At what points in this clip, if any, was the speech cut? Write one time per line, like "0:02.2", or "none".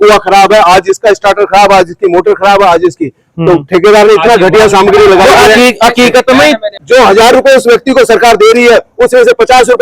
0:06.7